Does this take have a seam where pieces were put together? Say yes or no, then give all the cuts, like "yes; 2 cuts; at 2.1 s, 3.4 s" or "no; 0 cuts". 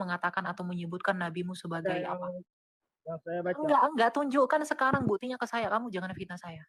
no; 0 cuts